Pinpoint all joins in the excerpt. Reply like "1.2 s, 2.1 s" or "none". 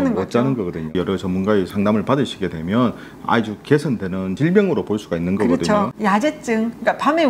0.9 s, 5.9 s